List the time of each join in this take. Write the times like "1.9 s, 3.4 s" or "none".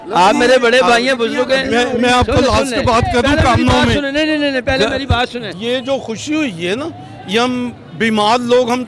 5.5 s